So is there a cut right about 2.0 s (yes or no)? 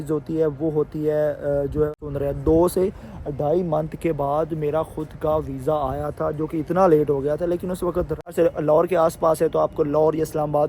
yes